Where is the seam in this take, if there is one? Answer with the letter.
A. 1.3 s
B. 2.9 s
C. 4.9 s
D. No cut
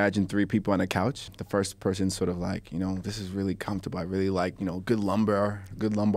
A